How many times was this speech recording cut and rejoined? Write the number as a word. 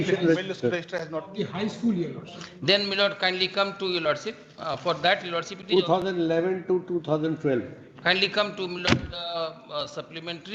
zero